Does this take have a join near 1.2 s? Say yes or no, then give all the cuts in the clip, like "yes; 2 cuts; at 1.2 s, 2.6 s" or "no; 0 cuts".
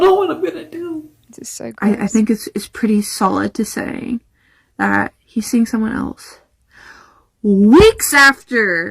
yes; 1 cut; at 1.2 s